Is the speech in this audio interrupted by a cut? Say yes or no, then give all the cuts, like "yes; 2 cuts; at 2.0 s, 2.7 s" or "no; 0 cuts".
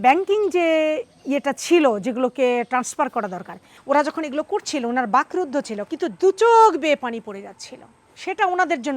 yes; 2 cuts; at 3.7 s, 5.8 s